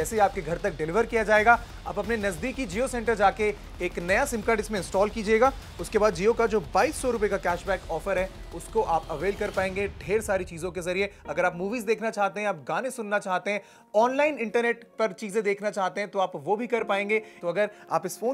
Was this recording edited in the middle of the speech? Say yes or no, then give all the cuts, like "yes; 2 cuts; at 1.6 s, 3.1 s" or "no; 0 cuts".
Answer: yes; 1 cut; at 17.4 s